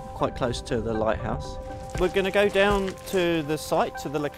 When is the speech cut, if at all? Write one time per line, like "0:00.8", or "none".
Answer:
0:01.8